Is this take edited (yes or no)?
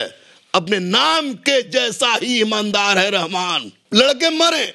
yes